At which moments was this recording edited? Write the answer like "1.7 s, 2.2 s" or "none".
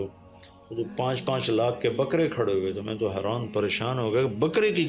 none